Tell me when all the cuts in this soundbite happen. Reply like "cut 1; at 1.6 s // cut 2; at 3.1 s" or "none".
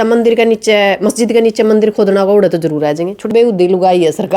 cut 1; at 3.3 s

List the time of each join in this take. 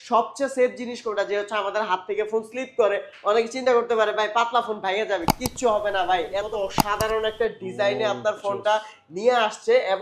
cut 1; at 6.5 s

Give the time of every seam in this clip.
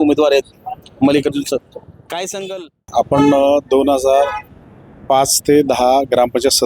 cut 1; at 2.9 s

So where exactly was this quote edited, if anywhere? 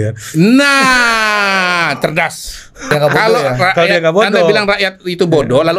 cut 1; at 2.9 s

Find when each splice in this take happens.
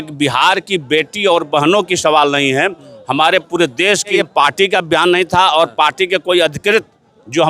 cut 1; at 4.2 s

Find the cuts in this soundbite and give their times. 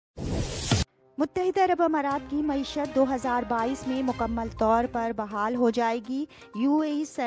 cut 1; at 1.0 s

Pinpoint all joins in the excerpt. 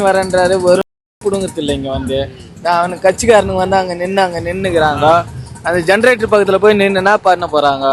none

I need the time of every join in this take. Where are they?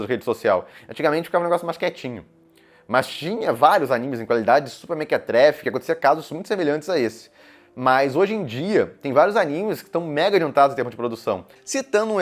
none

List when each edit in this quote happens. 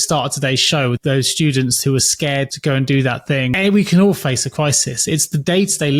cut 1; at 1.0 s // cut 2; at 2.5 s // cut 3; at 3.5 s

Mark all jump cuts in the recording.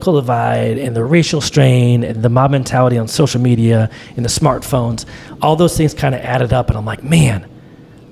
none

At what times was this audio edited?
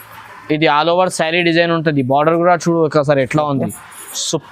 none

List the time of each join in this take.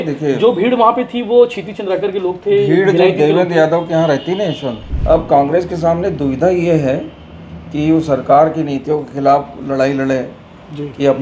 cut 1; at 4.9 s

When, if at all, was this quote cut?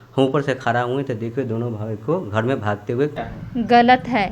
cut 1; at 3.3 s

